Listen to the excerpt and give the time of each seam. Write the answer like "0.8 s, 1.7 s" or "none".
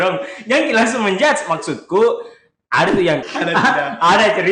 3.2 s